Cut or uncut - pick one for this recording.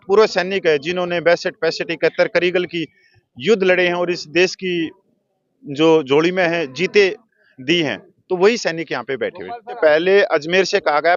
cut